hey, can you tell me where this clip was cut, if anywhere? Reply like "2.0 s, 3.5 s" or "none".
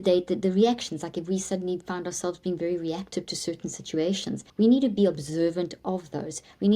4.4 s